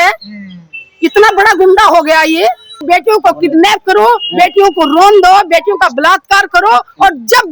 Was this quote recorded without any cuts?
no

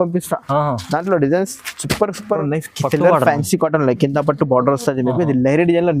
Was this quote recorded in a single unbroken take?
no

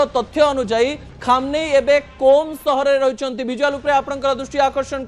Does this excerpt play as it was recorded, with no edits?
yes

